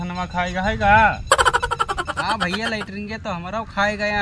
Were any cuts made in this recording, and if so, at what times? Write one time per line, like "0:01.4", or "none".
none